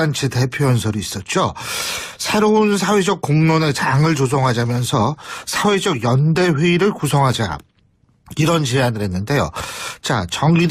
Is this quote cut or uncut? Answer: uncut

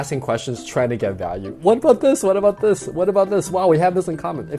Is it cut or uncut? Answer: uncut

